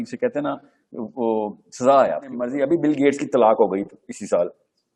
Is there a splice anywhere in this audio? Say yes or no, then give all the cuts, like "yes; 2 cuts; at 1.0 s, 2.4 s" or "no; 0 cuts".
yes; 1 cut; at 2.5 s